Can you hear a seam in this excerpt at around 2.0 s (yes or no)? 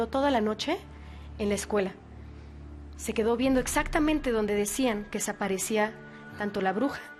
no